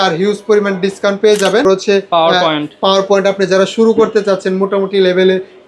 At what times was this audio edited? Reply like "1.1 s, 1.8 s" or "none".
1.6 s

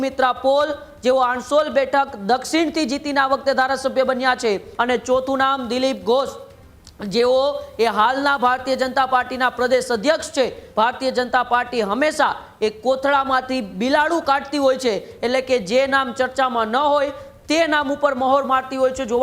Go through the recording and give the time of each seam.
4.7 s, 10.6 s

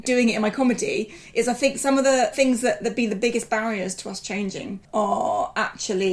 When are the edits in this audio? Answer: 2.3 s, 4.8 s

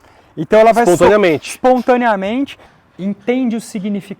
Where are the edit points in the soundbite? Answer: 2.6 s

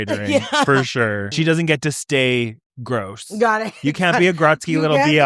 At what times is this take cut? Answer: 1.3 s

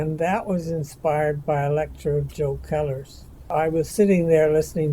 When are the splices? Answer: 3.4 s

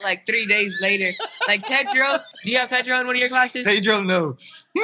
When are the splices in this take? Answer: 2.3 s

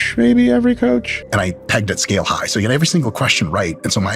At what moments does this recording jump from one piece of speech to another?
1.2 s

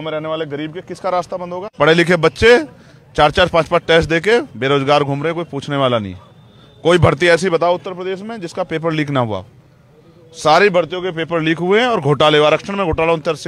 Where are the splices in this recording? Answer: 1.6 s

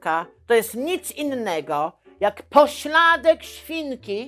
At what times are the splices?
none

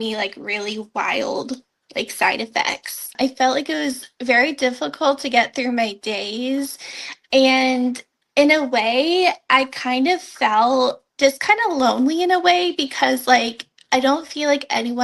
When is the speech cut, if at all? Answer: 3.1 s, 11.0 s

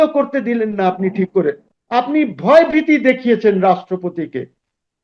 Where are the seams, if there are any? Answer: 1.6 s

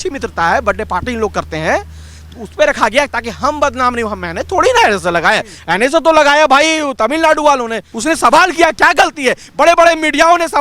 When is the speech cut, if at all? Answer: 7.9 s

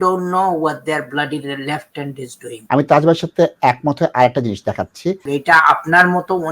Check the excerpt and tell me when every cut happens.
2.5 s, 5.2 s

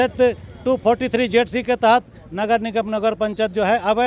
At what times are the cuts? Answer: none

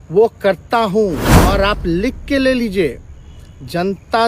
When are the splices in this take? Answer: 1.5 s

